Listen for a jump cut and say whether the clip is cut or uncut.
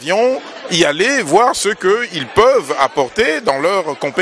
uncut